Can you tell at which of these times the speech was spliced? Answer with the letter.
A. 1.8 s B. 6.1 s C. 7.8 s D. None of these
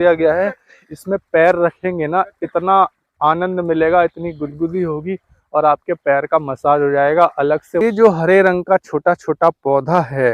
C